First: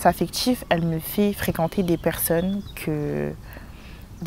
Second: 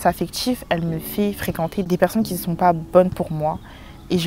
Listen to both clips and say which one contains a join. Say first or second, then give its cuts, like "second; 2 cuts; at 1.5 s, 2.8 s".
second; 1 cut; at 1.9 s